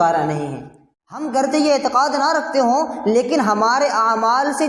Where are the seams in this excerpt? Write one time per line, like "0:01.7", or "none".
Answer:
0:01.2